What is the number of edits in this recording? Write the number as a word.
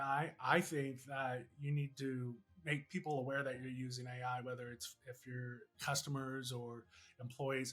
two